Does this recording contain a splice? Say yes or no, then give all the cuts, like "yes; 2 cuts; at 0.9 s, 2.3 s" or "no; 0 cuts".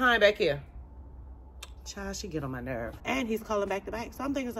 yes; 1 cut; at 3.0 s